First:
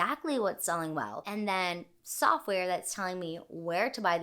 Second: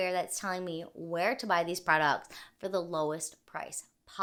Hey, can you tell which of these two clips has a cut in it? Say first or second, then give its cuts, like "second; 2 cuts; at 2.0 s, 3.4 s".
first; 1 cut; at 1.2 s